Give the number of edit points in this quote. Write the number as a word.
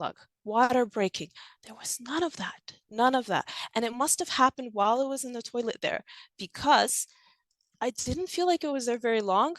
one